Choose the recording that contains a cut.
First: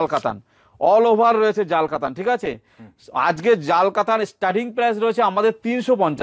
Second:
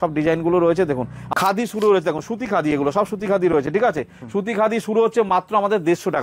second; 1 cut; at 1.1 s

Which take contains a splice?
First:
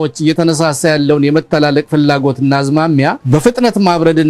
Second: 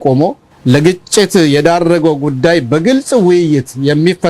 first; 1 cut; at 3.2 s

